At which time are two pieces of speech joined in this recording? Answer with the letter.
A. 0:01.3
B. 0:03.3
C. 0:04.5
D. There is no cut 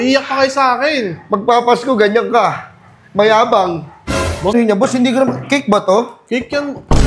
C